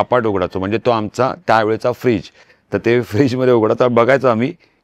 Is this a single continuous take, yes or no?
yes